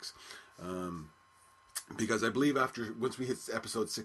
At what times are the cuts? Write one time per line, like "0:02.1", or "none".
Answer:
0:00.9

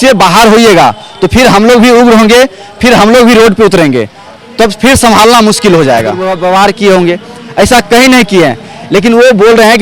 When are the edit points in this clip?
0:06.3

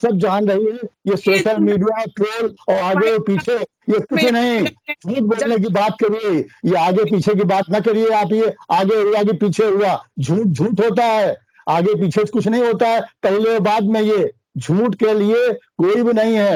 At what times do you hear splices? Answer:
none

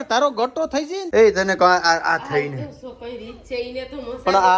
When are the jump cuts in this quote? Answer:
0:01.0

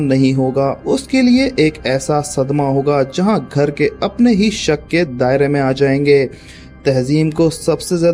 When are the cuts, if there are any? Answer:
none

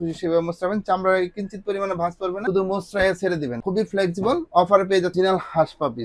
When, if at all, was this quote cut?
0:05.1

